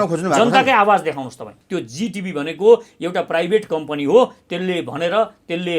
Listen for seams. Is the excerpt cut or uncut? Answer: cut